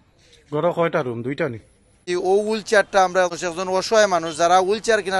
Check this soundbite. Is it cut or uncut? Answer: cut